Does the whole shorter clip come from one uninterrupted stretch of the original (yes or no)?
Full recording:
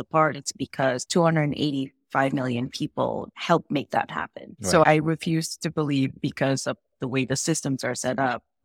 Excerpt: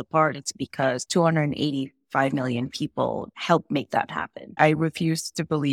no